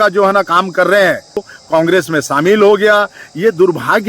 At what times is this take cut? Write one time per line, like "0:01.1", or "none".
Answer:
0:01.5